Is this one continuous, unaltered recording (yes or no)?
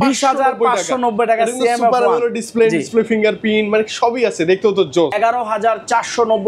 no